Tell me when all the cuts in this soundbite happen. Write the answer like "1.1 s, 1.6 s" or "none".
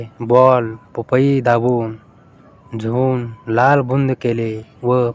none